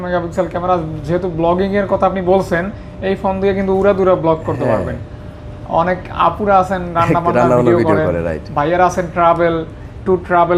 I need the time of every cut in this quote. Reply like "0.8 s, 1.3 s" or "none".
none

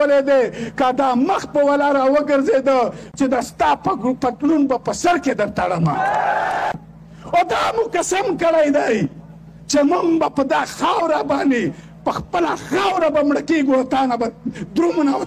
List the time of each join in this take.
3.0 s, 6.7 s

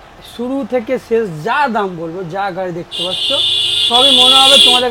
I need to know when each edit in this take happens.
none

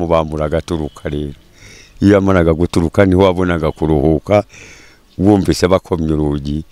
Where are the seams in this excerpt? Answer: none

